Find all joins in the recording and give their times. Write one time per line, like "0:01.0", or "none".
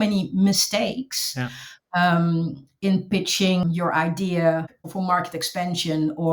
0:03.6
0:04.7

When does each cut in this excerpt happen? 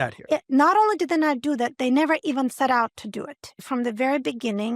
0:03.6

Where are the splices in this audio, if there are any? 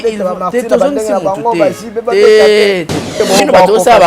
0:03.2

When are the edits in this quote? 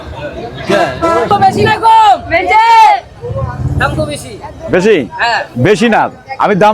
0:01.3

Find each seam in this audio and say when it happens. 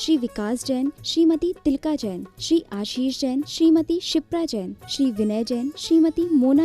none

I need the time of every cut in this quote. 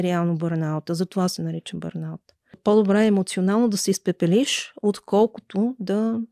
0:02.6

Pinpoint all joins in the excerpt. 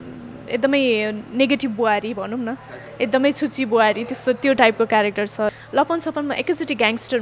0:05.5

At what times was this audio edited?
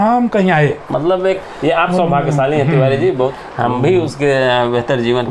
0:01.5
0:03.3

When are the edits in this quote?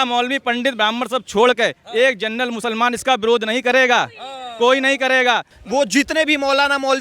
0:05.5

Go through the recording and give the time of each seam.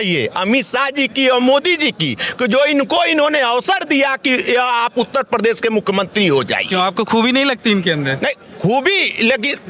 none

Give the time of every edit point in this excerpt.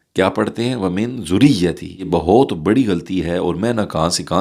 0:02.1

